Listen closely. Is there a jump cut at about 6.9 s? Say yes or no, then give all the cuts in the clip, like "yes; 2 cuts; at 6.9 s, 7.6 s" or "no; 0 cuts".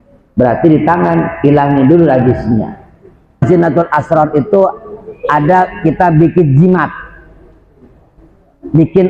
no; 1 cut; at 3.5 s